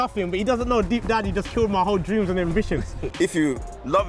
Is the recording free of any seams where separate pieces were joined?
no; 1 cut; at 3.0 s

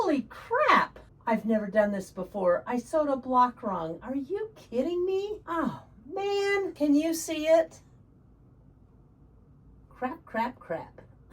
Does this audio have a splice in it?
yes; 4 cuts; at 1.1 s, 5.4 s, 6.7 s, 9.9 s

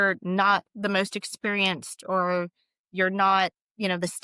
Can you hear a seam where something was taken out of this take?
no; 0 cuts

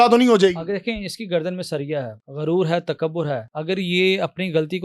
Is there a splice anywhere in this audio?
yes; 2 cuts; at 2.2 s, 3.5 s

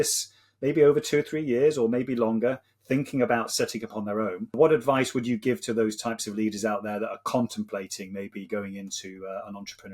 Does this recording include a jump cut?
yes; 1 cut; at 4.6 s

